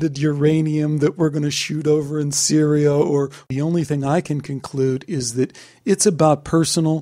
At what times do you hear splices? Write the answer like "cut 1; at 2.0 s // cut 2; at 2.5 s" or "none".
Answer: cut 1; at 3.5 s

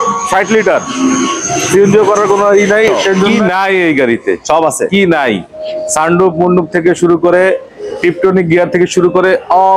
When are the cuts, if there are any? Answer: cut 1; at 3.4 s

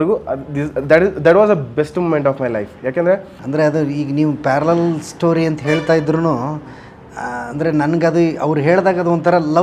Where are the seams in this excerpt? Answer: cut 1; at 3.3 s

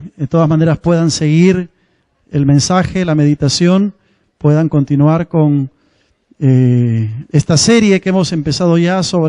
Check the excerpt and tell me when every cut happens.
cut 1; at 7.6 s

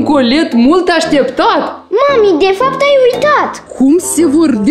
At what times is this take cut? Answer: cut 1; at 1.8 s // cut 2; at 3.6 s

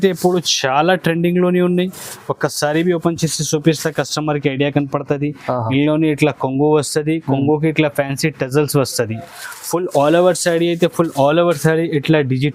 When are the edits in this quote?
none

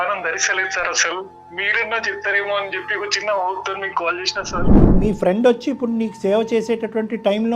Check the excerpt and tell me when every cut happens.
cut 1; at 5.0 s

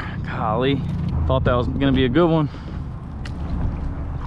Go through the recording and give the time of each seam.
cut 1; at 1.1 s

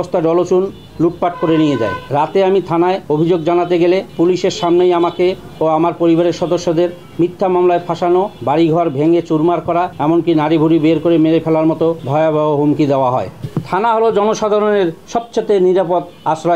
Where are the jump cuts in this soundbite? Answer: cut 1; at 2.0 s // cut 2; at 3.0 s // cut 3; at 4.1 s // cut 4; at 8.4 s // cut 5; at 9.9 s // cut 6; at 12.0 s // cut 7; at 13.4 s

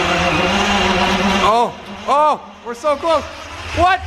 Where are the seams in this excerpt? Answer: cut 1; at 1.1 s

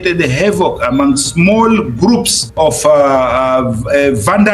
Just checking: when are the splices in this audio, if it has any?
cut 1; at 2.4 s

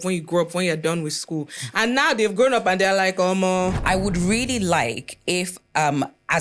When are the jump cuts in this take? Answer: cut 1; at 1.6 s // cut 2; at 3.8 s

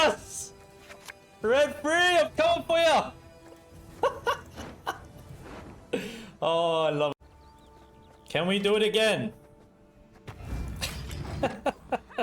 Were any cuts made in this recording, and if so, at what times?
cut 1; at 7.1 s

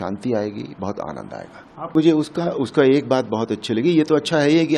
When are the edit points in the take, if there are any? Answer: cut 1; at 1.9 s

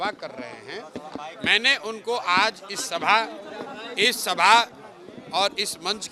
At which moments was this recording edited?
none

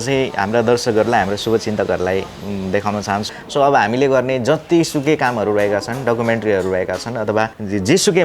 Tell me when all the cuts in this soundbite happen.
cut 1; at 3.2 s

